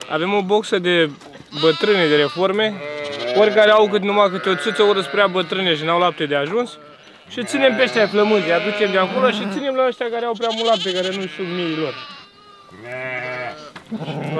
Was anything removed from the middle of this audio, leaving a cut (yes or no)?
no